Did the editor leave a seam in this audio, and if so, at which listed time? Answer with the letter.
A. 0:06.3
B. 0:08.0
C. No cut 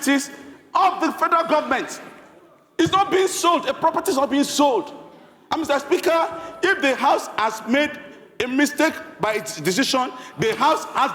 C